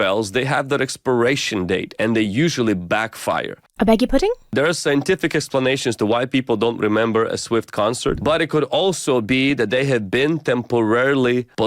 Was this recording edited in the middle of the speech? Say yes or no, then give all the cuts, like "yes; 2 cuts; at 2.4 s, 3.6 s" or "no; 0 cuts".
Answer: yes; 2 cuts; at 3.6 s, 4.5 s